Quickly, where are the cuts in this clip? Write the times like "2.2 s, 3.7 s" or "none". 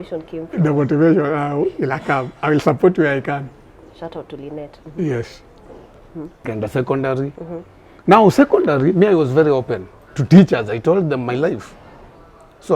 6.5 s